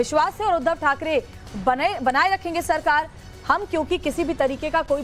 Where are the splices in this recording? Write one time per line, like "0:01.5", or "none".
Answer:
0:04.0